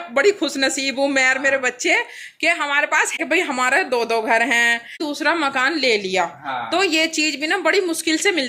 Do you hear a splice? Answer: yes; 2 cuts; at 3.2 s, 4.9 s

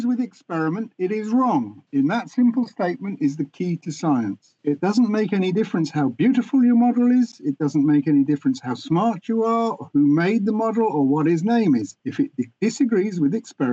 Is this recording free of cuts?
yes; 0 cuts

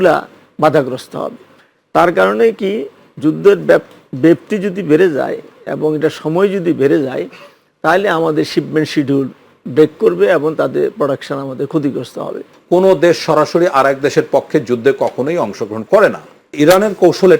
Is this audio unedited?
no; 2 cuts; at 12.5 s, 16.5 s

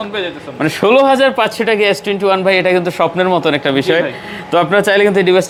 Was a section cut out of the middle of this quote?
no; 0 cuts

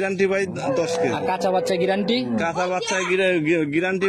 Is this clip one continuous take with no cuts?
yes; 0 cuts

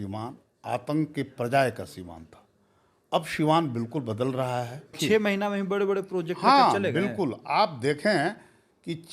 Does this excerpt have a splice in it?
yes; 1 cut; at 5.0 s

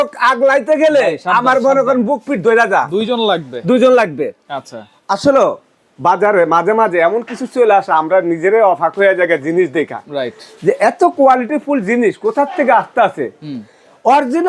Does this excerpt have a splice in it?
no; 0 cuts

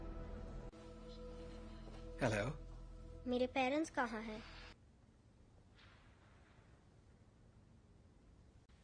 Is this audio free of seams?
no; 1 cut; at 4.8 s

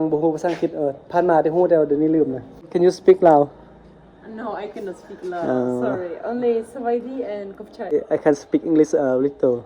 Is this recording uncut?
no; 2 cuts; at 2.6 s, 7.9 s

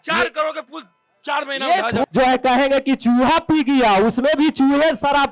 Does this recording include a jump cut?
yes; 1 cut; at 2.0 s

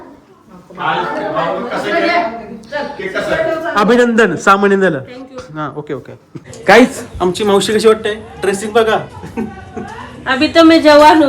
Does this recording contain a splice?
yes; 1 cut; at 6.4 s

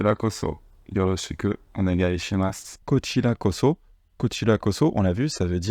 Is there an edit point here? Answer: no; 0 cuts

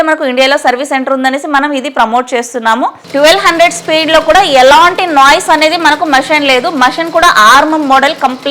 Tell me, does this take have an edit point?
yes; 1 cut; at 3.0 s

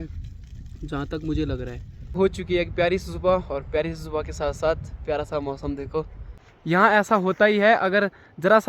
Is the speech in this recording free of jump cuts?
no; 2 cuts; at 2.2 s, 6.1 s

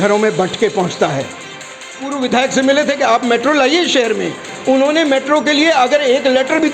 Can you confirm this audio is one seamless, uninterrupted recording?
no; 1 cut; at 1.9 s

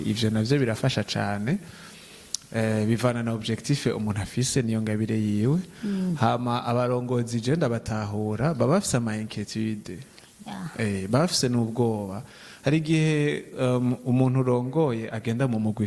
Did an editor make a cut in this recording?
no; 0 cuts

